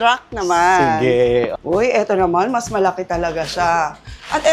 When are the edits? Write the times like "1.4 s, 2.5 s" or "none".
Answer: none